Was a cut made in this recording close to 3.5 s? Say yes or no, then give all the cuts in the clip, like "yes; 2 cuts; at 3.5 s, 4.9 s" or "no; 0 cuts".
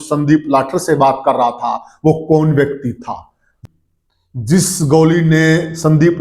yes; 1 cut; at 3.5 s